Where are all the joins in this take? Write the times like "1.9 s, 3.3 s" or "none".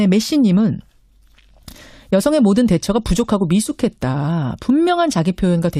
2.9 s